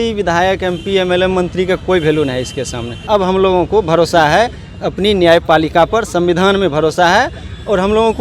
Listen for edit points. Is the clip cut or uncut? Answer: cut